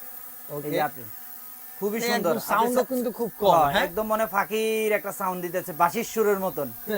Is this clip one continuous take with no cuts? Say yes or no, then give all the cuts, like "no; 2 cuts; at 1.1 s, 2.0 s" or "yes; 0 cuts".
yes; 0 cuts